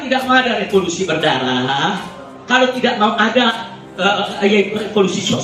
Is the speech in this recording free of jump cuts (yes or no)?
no